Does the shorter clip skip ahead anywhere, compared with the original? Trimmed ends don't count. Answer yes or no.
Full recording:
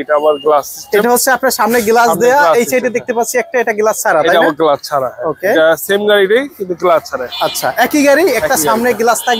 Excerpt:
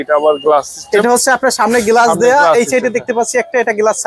no